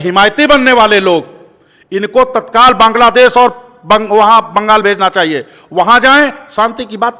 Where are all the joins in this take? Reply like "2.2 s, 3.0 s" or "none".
none